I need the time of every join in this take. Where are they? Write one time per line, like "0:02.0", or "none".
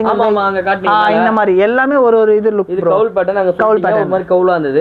none